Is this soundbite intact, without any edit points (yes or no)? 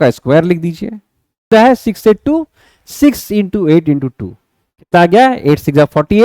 no